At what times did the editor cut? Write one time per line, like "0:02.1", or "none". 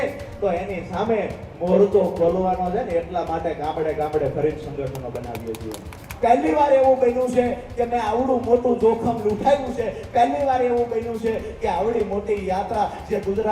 0:06.0

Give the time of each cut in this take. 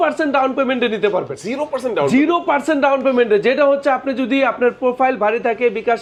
none

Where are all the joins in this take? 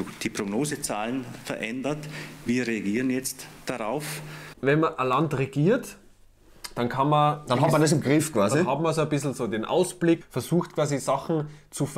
none

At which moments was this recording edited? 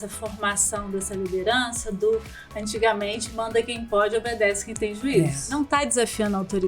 0:05.6

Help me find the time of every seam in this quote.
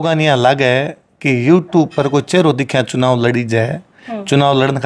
none

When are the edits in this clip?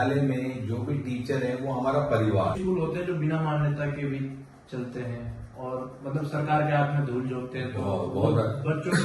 0:02.6

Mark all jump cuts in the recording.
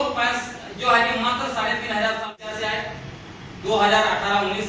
0:02.4

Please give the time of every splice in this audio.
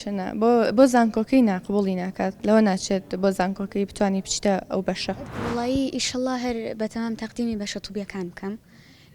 0:05.3

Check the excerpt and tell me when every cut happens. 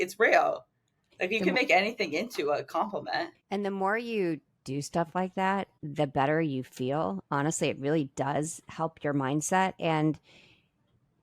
0:03.4
0:05.8

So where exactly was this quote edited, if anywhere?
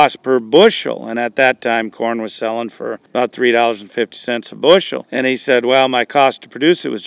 0:03.0
0:05.0

